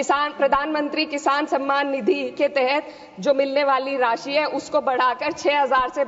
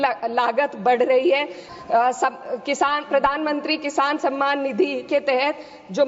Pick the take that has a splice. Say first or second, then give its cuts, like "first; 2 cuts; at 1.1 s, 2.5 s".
second; 1 cut; at 1.7 s